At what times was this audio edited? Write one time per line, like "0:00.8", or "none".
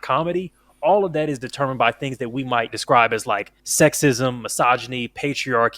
0:02.7
0:03.6